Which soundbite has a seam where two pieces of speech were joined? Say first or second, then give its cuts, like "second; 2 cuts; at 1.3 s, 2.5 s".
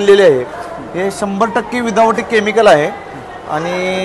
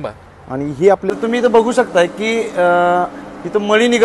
second; 1 cut; at 1.1 s